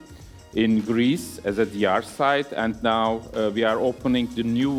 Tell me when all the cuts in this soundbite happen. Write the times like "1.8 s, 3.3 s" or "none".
none